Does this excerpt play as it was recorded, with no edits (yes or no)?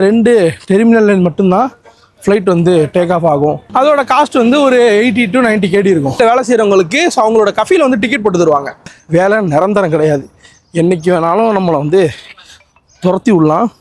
no